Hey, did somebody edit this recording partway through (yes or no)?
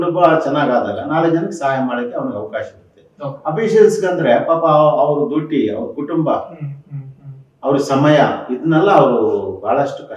no